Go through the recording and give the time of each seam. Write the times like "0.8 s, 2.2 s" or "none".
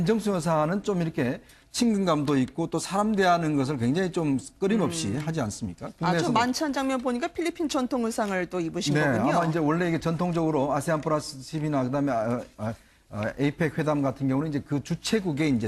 12.1 s